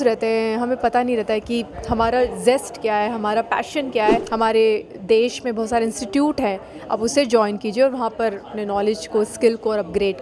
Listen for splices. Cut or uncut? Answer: cut